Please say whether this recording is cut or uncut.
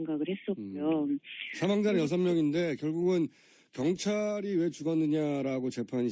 uncut